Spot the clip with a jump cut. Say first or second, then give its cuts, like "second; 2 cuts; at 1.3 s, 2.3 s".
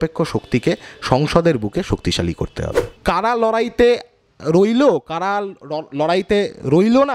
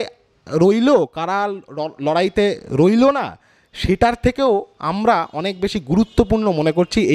first; 1 cut; at 3.0 s